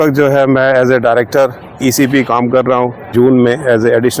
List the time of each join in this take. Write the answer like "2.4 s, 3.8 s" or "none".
1.6 s, 3.1 s